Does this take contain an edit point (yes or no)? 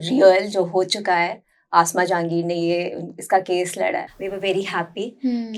yes